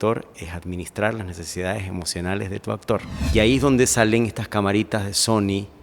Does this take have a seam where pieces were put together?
yes; 1 cut; at 3.2 s

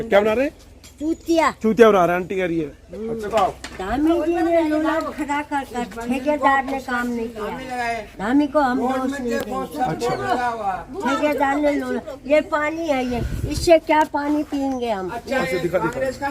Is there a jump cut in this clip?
yes; 1 cut; at 3.2 s

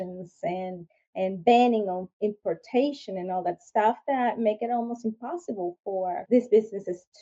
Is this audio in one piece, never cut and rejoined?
no; 1 cut; at 6.2 s

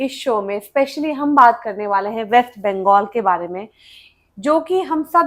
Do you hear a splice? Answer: no; 0 cuts

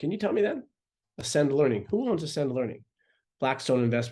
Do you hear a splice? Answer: no; 0 cuts

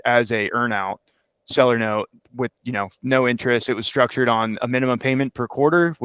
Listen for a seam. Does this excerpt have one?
no; 0 cuts

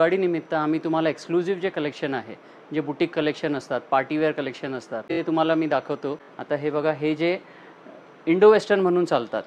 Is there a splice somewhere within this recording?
yes; 2 cuts; at 5.2 s, 6.3 s

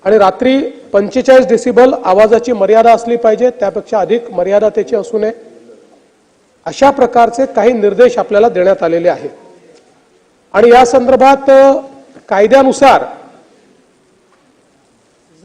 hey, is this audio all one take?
yes; 0 cuts

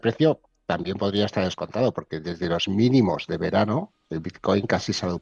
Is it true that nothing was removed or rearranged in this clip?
yes; 0 cuts

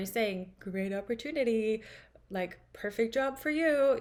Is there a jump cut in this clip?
no; 0 cuts

